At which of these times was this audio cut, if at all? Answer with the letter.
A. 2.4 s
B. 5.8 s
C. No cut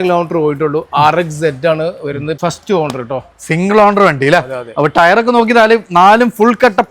A